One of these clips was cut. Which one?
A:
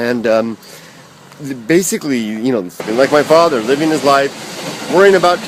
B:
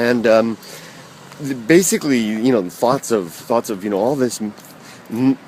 B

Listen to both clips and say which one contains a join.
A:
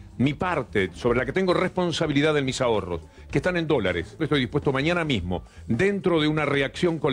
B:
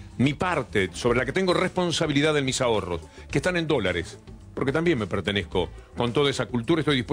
A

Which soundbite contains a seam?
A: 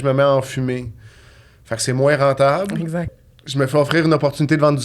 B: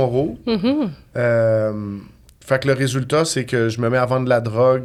A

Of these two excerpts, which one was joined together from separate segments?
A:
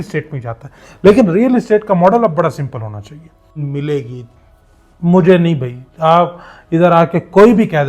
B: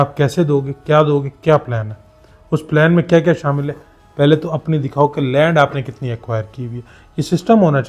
A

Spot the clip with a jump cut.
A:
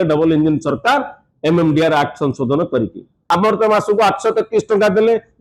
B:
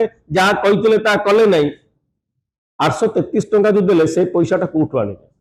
A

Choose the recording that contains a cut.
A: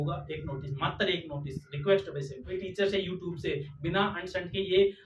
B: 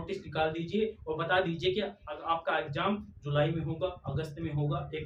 A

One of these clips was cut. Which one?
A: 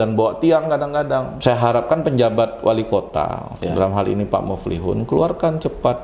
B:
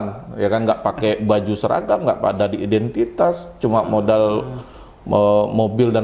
A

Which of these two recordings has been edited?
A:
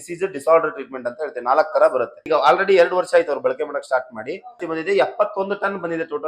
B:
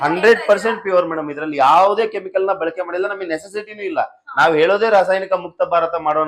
A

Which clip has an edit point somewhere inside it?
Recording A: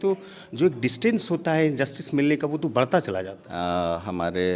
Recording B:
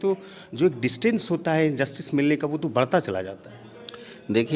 A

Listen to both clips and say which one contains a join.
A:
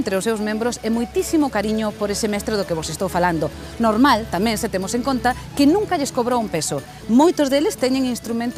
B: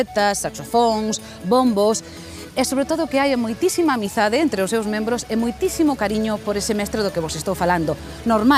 A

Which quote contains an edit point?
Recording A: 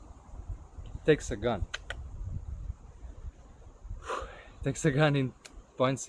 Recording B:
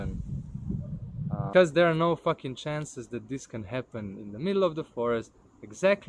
B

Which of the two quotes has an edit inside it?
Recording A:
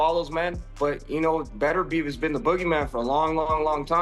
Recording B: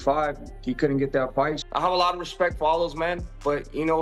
B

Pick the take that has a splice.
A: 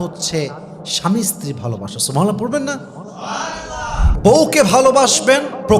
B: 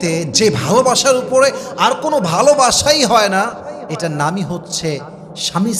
A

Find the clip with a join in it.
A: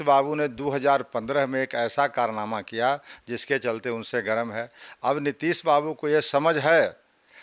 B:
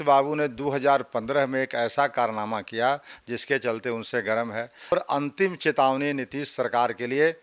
B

